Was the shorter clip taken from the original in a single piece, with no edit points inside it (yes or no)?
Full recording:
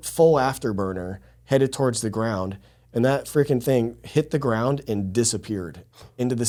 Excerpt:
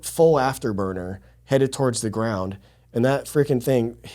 yes